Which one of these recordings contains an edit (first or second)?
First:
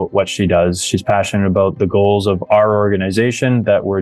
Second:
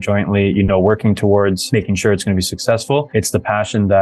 second